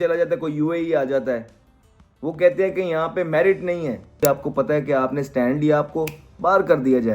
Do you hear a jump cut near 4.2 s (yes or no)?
yes